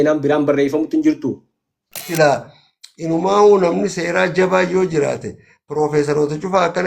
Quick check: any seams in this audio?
yes; 1 cut; at 2.0 s

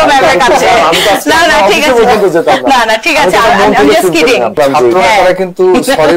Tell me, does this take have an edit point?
yes; 1 cut; at 4.6 s

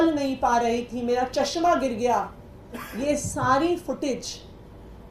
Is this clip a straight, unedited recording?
yes; 0 cuts

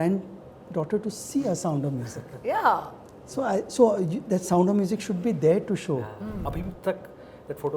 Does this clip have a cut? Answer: yes; 1 cut; at 6.4 s

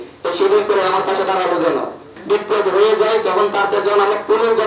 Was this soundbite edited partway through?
yes; 1 cut; at 2.1 s

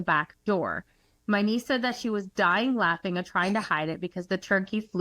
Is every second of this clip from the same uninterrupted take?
yes; 0 cuts

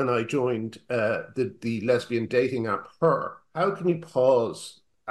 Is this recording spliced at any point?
yes; 1 cut; at 3.4 s

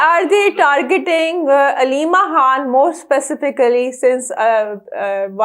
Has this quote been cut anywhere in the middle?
no; 0 cuts

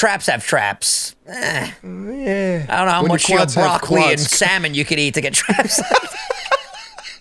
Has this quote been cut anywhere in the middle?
no; 0 cuts

